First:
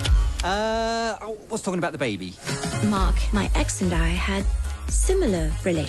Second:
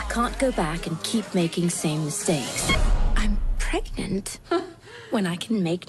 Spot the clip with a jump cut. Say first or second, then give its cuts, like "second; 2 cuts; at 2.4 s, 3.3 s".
first; 1 cut; at 2.3 s